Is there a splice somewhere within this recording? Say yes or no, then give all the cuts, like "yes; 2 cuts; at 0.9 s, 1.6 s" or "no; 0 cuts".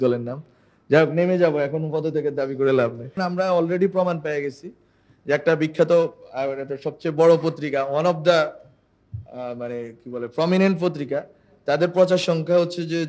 yes; 1 cut; at 3.2 s